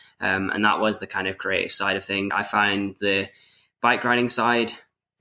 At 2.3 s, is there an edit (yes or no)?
yes